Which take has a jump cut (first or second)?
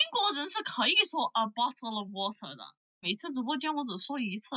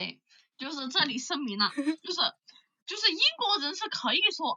first